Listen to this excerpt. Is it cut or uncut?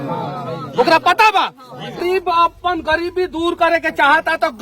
cut